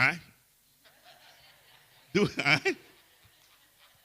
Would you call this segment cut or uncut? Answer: cut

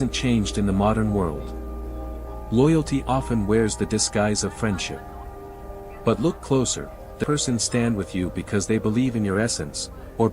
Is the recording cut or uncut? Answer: cut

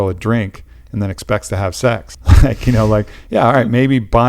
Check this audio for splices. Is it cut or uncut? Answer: cut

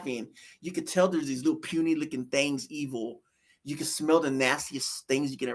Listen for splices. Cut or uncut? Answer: uncut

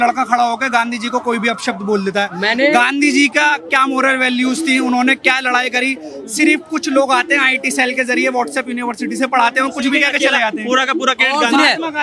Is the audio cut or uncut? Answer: uncut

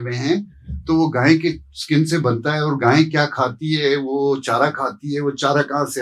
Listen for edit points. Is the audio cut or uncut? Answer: uncut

